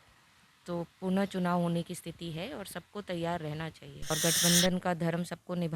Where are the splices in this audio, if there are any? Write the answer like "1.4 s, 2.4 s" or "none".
4.1 s